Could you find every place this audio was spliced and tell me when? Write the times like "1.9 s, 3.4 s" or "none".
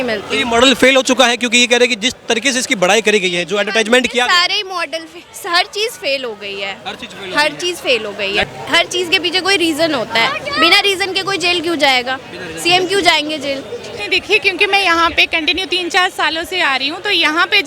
8.4 s, 13.9 s